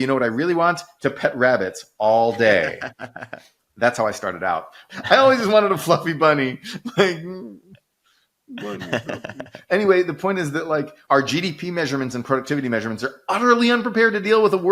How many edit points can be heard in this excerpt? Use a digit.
2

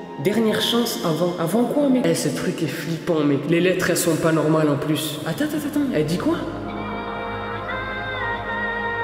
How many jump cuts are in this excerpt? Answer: 2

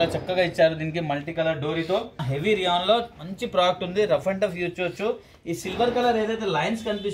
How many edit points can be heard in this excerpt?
1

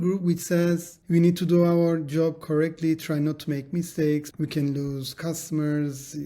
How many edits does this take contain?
2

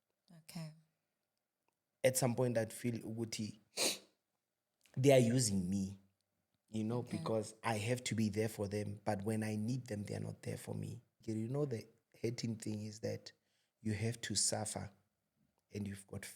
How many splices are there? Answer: 1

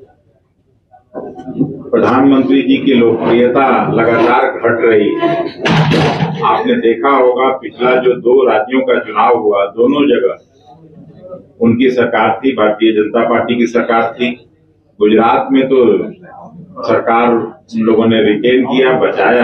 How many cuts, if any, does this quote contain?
0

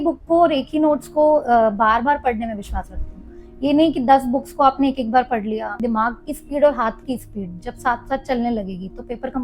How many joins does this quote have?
1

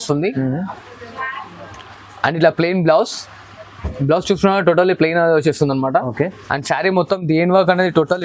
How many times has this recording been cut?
0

